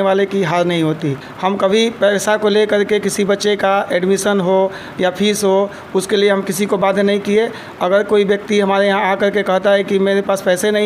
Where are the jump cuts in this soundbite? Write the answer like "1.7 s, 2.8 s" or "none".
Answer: 1.3 s